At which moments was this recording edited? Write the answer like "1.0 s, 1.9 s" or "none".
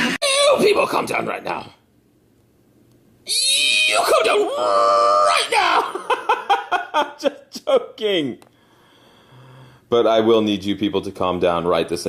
8.2 s